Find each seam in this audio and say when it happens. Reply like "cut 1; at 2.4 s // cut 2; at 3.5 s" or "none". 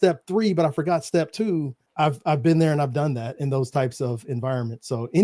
cut 1; at 1.8 s